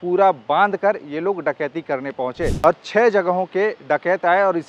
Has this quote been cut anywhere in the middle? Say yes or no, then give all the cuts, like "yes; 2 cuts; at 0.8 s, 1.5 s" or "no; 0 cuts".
yes; 1 cut; at 2.5 s